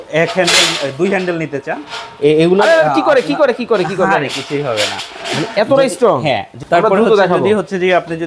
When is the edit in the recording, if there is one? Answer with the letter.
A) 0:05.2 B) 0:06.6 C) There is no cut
B